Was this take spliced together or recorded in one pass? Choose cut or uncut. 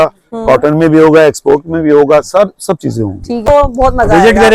cut